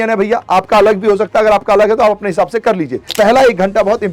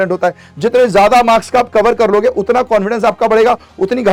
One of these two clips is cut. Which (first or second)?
first